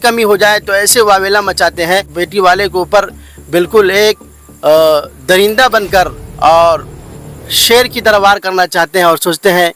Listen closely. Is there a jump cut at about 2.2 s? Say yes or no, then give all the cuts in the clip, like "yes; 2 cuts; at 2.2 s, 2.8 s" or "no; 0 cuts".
yes; 1 cut; at 2.2 s